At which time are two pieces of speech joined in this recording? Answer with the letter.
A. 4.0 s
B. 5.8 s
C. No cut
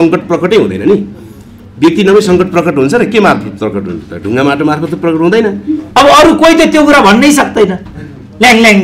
B